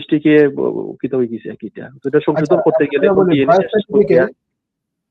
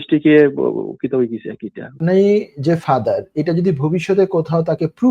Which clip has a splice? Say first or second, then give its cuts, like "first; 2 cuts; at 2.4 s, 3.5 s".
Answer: second; 1 cut; at 2.0 s